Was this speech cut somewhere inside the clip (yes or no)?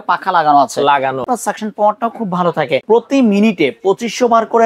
yes